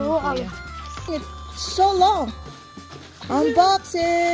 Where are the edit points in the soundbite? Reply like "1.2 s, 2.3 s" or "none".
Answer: 1.1 s